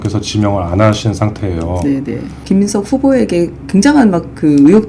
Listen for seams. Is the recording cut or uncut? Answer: cut